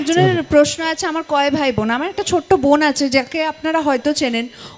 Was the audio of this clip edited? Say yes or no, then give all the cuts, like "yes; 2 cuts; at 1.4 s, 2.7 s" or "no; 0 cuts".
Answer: no; 0 cuts